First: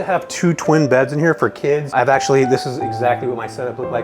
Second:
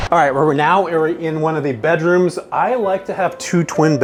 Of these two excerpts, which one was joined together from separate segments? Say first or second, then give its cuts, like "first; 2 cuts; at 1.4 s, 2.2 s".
first; 1 cut; at 1.9 s